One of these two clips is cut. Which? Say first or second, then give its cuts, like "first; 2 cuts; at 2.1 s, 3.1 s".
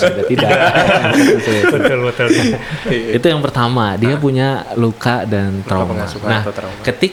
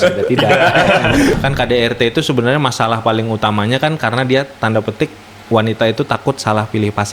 second; 1 cut; at 1.3 s